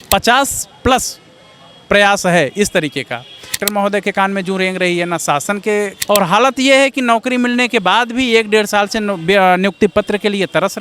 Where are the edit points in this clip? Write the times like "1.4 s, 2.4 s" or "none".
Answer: 3.6 s, 6.0 s